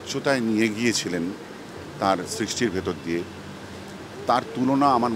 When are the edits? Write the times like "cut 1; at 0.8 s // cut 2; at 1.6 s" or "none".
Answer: none